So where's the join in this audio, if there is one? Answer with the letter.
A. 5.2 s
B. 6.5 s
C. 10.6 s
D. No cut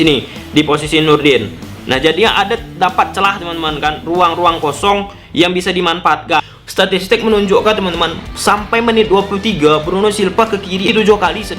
B